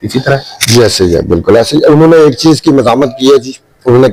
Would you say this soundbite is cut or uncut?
uncut